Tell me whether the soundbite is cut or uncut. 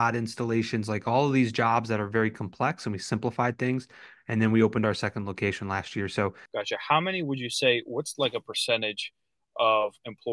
cut